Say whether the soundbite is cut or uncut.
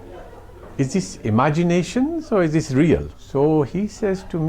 cut